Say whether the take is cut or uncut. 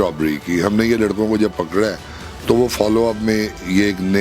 uncut